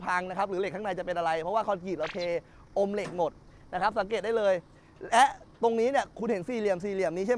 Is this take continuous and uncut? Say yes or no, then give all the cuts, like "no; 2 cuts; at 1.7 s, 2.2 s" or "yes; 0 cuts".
yes; 0 cuts